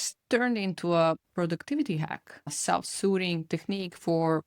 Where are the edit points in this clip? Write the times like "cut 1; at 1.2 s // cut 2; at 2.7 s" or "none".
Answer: cut 1; at 1.3 s // cut 2; at 2.6 s